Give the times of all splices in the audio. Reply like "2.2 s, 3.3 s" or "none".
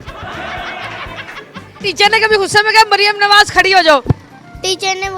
1.7 s